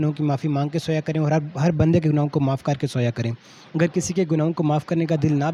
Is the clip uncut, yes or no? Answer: yes